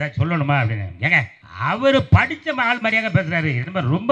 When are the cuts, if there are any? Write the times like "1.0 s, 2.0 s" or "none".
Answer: 1.4 s